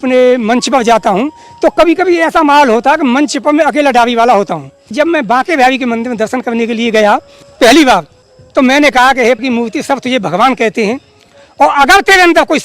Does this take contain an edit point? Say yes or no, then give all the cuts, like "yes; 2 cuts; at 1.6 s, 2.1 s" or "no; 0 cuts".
yes; 2 cuts; at 4.9 s, 7.4 s